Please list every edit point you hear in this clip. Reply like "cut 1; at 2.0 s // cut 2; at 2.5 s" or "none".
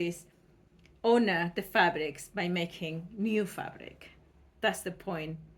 none